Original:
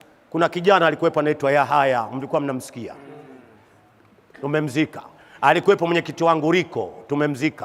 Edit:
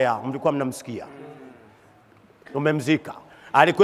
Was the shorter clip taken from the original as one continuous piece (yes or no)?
yes